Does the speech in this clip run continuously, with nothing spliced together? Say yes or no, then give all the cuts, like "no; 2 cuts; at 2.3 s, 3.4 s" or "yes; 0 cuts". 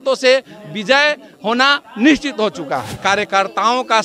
no; 1 cut; at 2.9 s